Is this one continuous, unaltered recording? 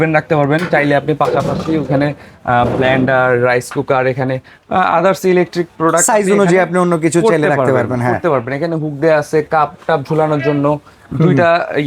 yes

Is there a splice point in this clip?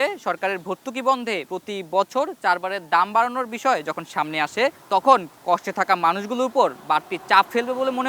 yes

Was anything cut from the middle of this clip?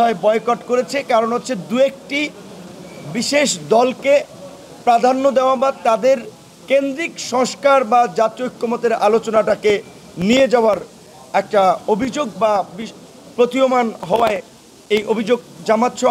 no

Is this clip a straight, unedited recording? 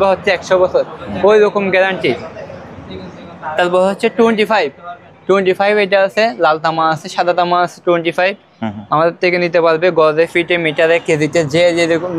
yes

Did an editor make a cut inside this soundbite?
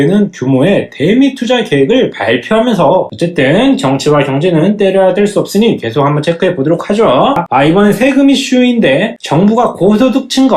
yes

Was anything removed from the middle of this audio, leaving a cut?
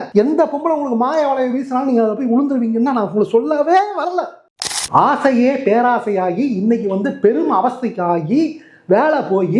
yes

